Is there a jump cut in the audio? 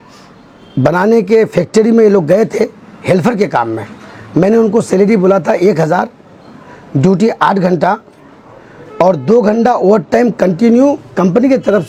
no; 0 cuts

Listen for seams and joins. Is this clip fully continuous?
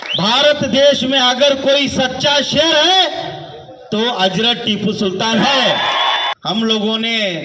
no; 1 cut; at 6.3 s

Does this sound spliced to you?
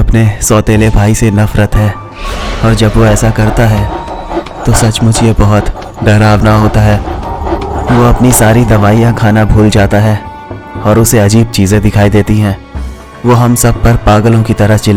no; 0 cuts

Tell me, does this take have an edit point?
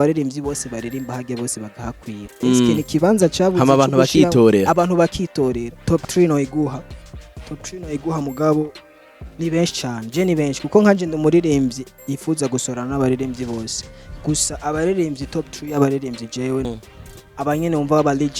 yes; 2 cuts; at 5.7 s, 16.6 s

